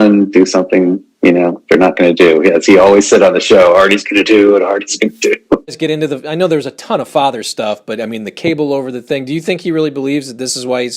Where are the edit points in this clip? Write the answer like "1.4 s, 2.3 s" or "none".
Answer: 5.8 s